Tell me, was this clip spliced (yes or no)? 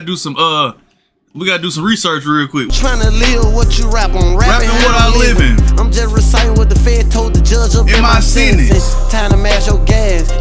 yes